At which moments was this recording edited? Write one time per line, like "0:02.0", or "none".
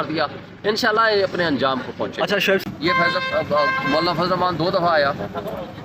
0:02.6